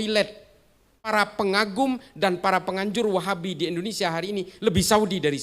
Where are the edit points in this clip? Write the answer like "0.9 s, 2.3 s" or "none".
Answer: 1.3 s